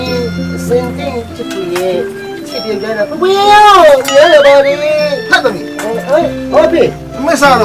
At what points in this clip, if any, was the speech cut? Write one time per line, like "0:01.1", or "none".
none